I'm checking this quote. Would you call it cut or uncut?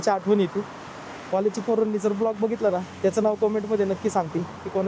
uncut